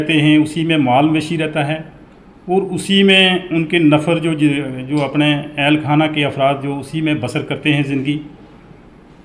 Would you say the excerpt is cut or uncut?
uncut